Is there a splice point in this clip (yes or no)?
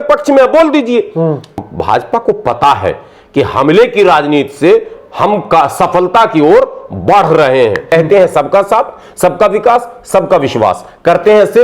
yes